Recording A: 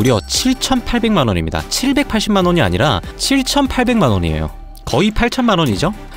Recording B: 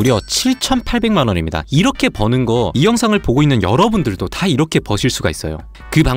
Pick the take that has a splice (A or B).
B